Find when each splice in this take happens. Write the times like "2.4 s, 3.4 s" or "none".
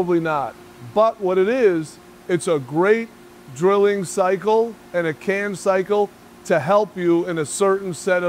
none